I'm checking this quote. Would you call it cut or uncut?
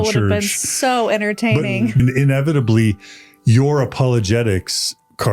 cut